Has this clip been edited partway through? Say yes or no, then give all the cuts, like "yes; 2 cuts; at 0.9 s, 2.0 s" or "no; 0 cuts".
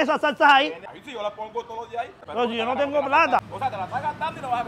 yes; 3 cuts; at 0.9 s, 2.2 s, 3.4 s